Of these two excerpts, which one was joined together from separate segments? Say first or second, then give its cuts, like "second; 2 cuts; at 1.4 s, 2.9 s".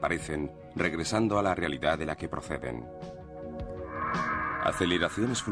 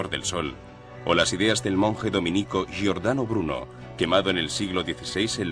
second; 1 cut; at 4.4 s